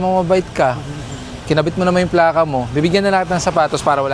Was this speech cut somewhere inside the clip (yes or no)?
no